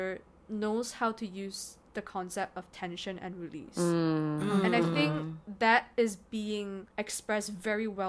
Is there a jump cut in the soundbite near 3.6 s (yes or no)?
no